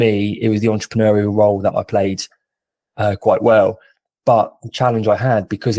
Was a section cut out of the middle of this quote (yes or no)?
no